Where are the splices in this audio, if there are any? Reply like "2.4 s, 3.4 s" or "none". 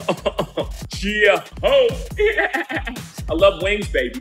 1.0 s